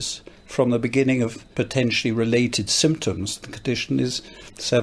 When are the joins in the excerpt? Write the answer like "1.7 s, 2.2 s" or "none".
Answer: 1.4 s